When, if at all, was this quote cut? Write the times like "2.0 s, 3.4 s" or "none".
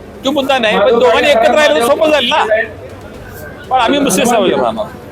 none